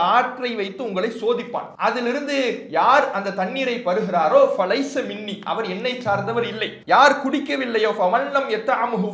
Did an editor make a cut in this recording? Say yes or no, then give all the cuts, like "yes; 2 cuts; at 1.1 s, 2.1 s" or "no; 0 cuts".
yes; 2 cuts; at 1.7 s, 6.7 s